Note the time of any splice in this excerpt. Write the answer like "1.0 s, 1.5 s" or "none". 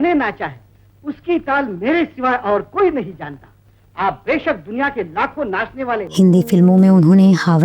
none